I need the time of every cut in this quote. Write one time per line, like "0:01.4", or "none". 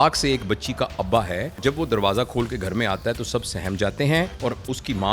0:01.6
0:04.3